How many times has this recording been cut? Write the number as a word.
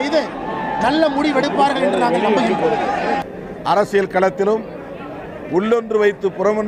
one